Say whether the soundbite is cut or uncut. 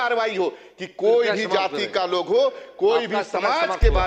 uncut